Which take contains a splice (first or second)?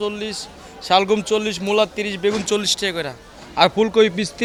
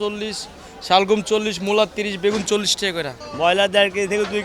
second